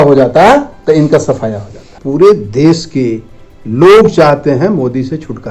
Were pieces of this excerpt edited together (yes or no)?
yes